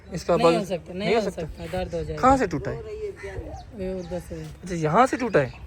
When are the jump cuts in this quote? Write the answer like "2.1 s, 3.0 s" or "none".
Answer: none